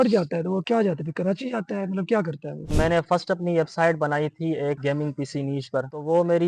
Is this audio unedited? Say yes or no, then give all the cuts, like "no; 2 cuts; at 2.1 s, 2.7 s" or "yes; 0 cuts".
no; 1 cut; at 2.7 s